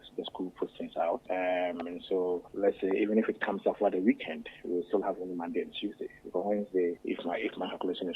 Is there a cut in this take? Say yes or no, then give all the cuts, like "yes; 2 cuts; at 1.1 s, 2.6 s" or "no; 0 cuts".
yes; 3 cuts; at 1.2 s, 2.5 s, 7.0 s